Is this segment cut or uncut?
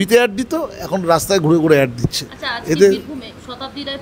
uncut